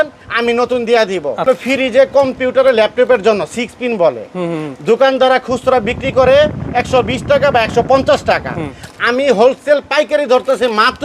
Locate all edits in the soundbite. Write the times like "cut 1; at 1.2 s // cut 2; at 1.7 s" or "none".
cut 1; at 1.5 s